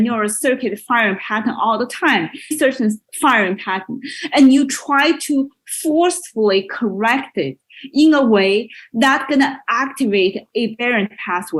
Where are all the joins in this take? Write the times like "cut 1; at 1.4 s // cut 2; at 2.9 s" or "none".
none